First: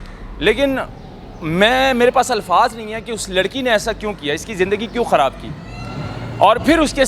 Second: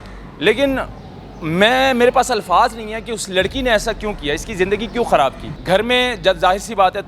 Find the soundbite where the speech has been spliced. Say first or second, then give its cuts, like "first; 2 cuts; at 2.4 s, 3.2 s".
second; 1 cut; at 5.5 s